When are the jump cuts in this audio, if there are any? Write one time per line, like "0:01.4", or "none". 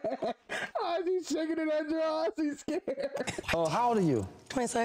0:03.4